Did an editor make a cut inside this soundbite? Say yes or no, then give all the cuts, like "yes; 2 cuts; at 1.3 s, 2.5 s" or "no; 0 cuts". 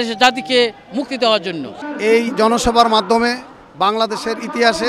yes; 1 cut; at 1.7 s